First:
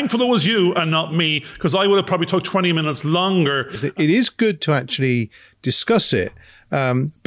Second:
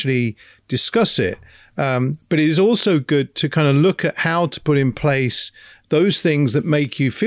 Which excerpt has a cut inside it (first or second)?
first